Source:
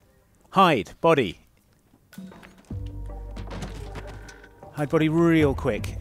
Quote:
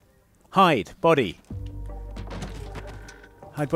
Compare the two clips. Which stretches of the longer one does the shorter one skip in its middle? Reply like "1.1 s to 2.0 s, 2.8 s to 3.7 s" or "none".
1.4 s to 2.6 s